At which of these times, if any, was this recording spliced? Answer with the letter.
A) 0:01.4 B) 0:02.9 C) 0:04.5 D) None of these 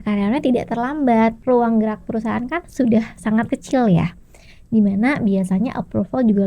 A